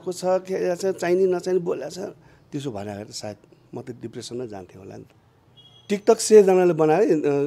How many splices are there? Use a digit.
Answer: 1